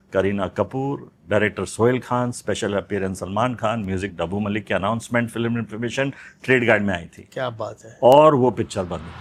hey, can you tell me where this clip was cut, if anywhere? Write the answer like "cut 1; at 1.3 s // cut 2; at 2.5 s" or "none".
none